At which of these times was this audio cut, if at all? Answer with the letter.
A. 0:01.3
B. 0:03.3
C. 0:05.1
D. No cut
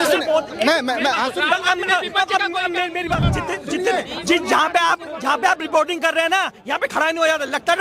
B